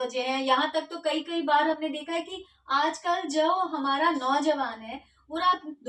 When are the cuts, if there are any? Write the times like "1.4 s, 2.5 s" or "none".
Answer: none